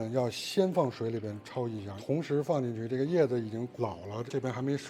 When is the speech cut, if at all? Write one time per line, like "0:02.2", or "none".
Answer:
0:02.0